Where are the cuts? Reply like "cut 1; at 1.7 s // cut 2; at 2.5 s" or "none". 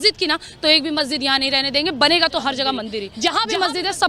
cut 1; at 3.0 s